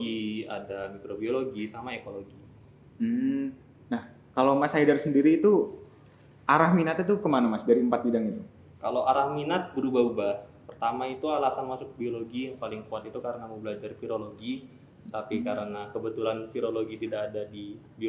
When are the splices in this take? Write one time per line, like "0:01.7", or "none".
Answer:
none